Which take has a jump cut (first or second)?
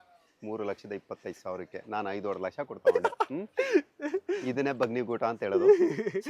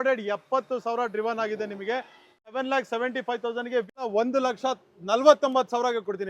second